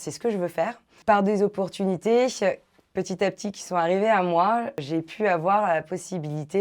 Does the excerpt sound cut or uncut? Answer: cut